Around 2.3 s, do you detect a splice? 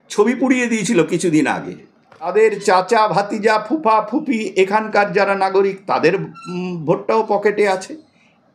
yes; 1 cut; at 2.3 s

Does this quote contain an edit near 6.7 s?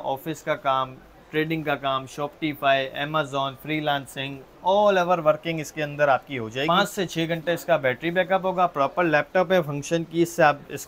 yes; 1 cut; at 6.7 s

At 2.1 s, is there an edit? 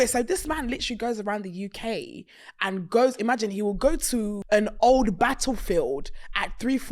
no; 1 cut; at 4.4 s

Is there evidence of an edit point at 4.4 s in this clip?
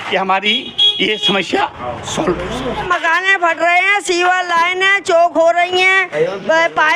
no; 1 cut; at 2.9 s

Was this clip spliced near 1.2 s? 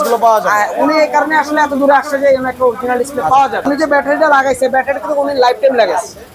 no; 1 cut; at 3.6 s

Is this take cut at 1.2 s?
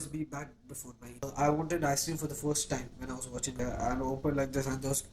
yes; 2 cuts; at 1.2 s, 3.5 s

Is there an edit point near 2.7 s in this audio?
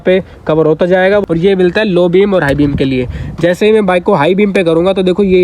no; 1 cut; at 1.2 s

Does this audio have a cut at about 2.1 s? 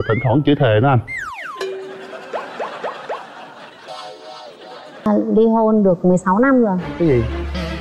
no; 1 cut; at 5.1 s

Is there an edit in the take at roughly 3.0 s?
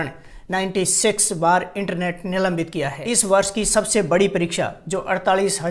yes; 1 cut; at 3.0 s

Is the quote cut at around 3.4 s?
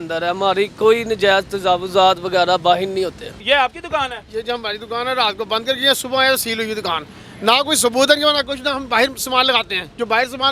yes; 1 cut; at 3.4 s

